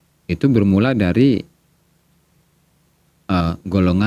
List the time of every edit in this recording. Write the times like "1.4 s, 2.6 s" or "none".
none

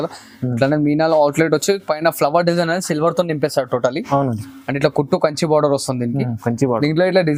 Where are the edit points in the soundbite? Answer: none

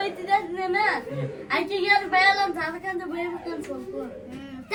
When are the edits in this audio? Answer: none

